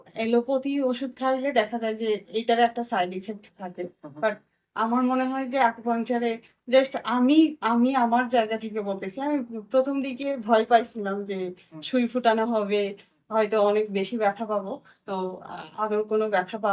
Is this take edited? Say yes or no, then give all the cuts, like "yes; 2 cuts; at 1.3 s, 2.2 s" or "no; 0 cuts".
no; 0 cuts